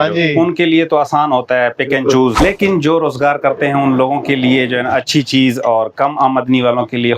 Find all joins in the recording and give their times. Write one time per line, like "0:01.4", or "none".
0:02.4